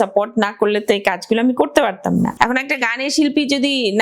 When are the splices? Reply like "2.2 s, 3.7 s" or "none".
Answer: 2.3 s